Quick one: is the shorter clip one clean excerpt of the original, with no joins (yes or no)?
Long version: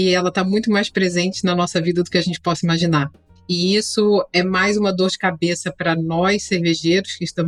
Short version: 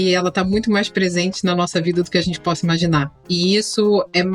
no